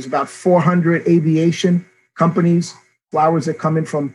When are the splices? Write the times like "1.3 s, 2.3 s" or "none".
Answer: 3.1 s